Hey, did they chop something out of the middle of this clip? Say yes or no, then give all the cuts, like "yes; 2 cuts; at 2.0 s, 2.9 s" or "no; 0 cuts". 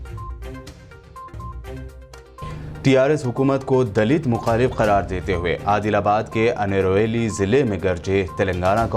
yes; 1 cut; at 2.4 s